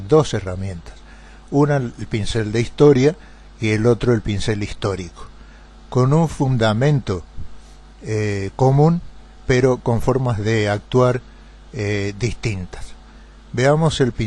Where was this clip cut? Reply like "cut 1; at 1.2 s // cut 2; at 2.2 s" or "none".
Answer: none